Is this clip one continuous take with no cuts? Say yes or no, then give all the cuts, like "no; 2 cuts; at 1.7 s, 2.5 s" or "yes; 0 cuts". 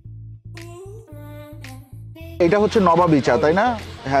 no; 1 cut; at 2.3 s